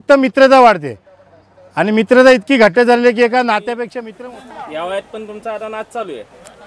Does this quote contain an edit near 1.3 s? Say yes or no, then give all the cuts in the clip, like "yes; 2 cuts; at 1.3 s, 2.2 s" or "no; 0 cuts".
no; 1 cut; at 4.0 s